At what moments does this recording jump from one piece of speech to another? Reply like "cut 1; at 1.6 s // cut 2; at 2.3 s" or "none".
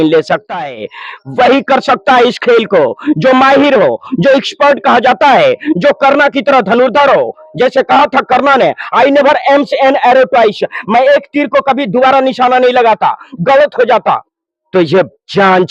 none